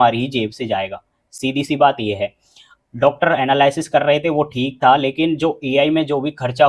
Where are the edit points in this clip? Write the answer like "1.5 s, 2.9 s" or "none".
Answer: none